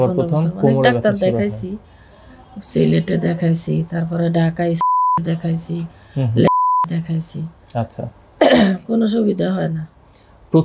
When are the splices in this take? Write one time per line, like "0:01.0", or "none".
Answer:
none